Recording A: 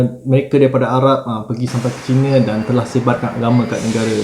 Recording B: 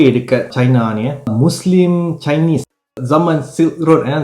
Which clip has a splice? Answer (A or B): B